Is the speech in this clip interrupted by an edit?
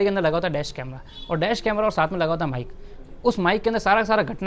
no; 0 cuts

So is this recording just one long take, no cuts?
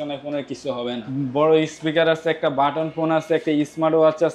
no; 1 cut; at 1.0 s

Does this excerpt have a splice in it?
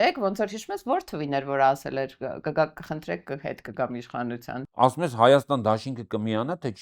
yes; 1 cut; at 4.6 s

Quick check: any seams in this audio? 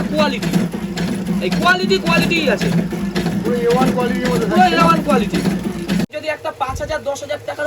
yes; 1 cut; at 6.1 s

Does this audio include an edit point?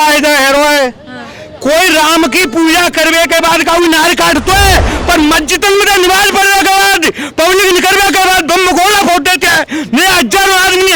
no; 0 cuts

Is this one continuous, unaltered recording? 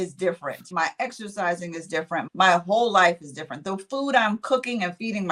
yes; 0 cuts

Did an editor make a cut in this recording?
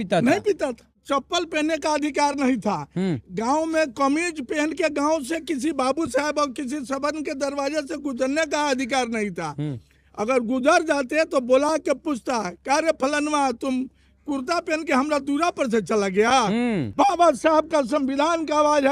yes; 2 cuts; at 1.0 s, 16.9 s

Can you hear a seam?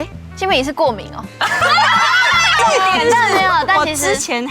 yes; 1 cut; at 2.6 s

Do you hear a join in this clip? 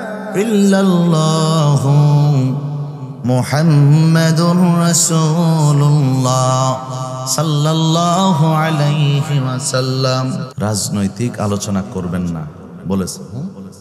yes; 1 cut; at 10.5 s

